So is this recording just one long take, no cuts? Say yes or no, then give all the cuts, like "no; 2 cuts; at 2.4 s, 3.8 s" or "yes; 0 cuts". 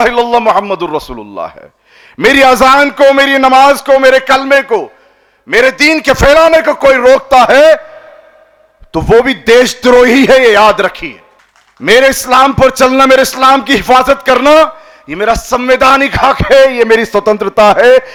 yes; 0 cuts